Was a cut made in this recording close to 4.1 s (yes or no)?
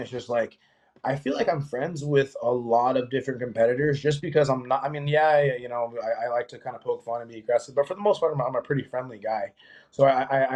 no